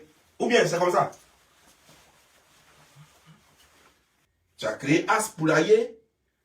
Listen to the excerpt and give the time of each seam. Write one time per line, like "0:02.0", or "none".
0:04.1